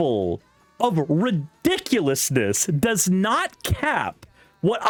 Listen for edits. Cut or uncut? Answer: uncut